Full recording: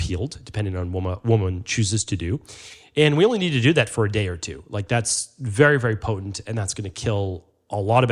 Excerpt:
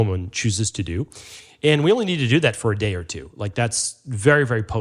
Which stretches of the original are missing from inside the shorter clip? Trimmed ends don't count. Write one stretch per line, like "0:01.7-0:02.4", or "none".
none